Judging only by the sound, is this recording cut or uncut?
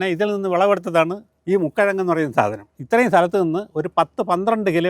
cut